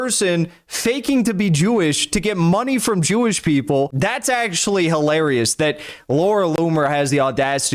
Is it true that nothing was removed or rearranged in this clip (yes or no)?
no